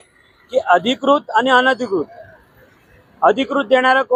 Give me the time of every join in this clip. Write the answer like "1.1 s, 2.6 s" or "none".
none